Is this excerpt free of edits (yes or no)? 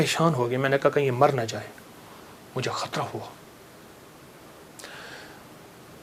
yes